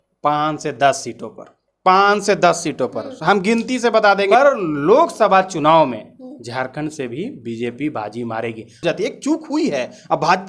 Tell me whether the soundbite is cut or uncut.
cut